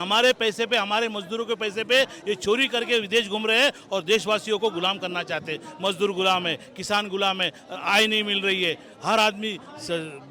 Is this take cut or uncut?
uncut